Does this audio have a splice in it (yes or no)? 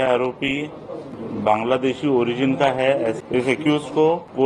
yes